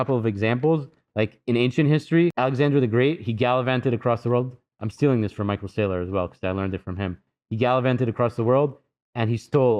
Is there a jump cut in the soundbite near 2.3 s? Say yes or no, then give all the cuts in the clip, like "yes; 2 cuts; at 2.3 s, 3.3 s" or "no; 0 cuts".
yes; 1 cut; at 2.3 s